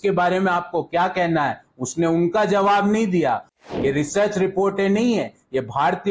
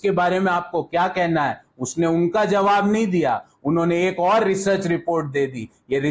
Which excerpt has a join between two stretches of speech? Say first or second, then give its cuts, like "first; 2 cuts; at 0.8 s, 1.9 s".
first; 1 cut; at 3.5 s